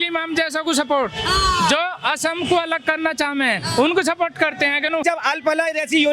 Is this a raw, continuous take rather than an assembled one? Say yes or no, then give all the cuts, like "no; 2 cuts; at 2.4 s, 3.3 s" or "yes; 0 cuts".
no; 1 cut; at 5.0 s